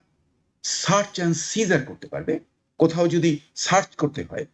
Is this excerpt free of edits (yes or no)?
yes